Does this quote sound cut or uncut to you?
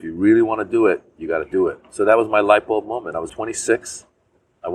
cut